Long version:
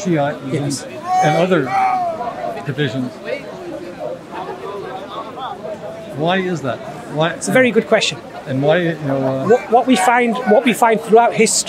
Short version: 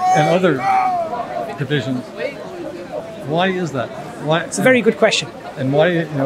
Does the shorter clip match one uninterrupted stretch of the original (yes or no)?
no